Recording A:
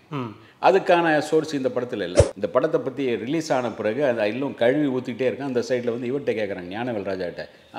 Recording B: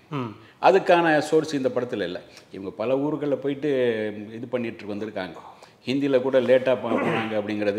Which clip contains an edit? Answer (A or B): A